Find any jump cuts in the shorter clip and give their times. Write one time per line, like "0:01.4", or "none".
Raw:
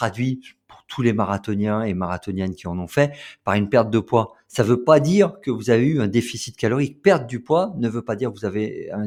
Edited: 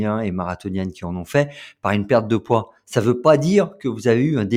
none